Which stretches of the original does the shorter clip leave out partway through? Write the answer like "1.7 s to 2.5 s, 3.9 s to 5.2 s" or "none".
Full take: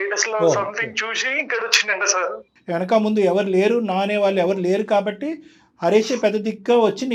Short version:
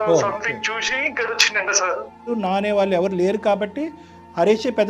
2.6 s to 3.8 s